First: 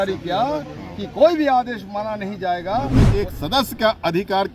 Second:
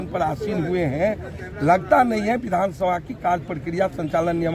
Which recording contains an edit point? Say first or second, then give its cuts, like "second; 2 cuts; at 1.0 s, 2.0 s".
first; 1 cut; at 3.0 s